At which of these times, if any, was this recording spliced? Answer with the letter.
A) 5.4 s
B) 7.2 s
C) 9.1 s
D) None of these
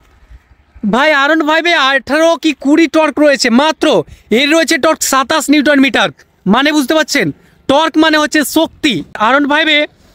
C